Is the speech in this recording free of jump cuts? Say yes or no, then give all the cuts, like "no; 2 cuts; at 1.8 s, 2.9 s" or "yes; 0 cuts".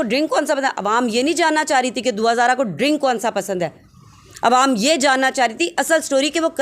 yes; 0 cuts